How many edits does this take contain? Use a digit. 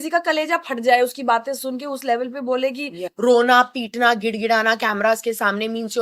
1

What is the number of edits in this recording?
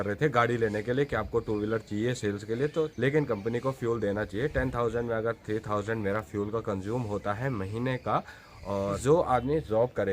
2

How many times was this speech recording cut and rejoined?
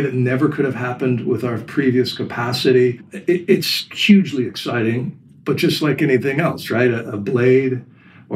1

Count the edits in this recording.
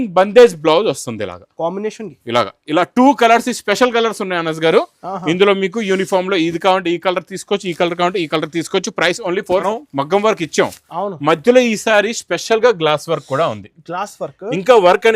1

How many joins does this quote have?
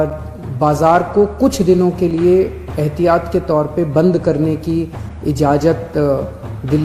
0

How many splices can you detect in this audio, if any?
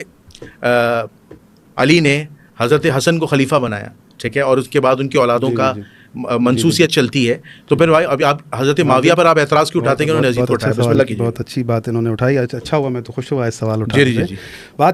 0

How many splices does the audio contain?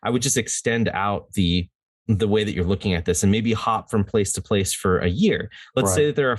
0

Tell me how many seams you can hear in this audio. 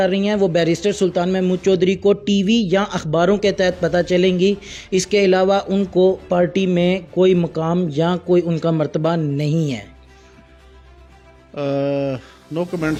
0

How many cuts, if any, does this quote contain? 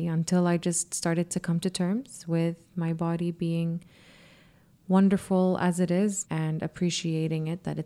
1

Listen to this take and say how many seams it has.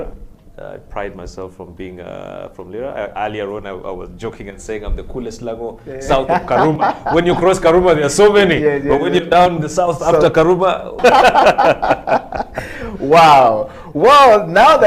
1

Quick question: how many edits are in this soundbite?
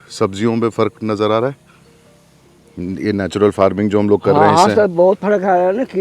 0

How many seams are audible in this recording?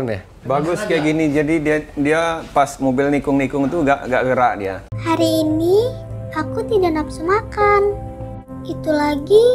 0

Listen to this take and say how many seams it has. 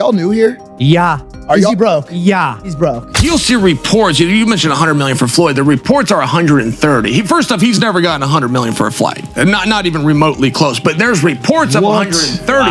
1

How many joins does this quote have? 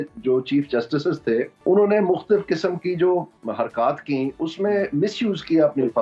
2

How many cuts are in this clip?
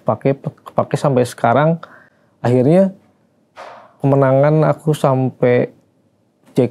0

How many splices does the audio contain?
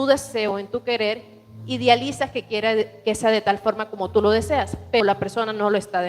1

